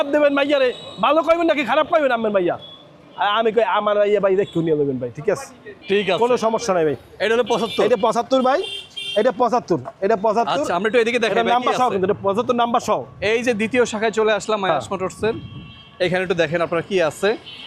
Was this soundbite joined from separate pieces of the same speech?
no; 0 cuts

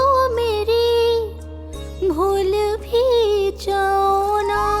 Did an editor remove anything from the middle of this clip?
no; 0 cuts

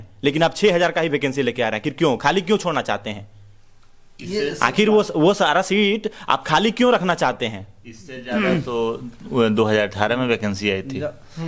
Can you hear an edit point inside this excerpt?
no; 0 cuts

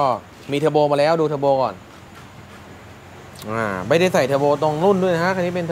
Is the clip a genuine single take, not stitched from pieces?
yes; 0 cuts

